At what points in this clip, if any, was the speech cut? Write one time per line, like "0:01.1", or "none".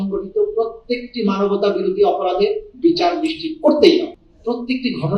0:04.2